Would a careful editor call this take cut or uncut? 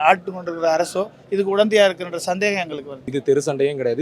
cut